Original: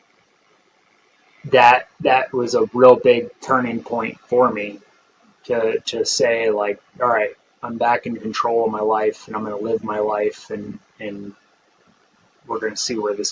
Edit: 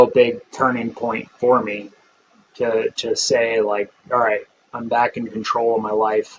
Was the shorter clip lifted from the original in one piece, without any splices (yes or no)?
yes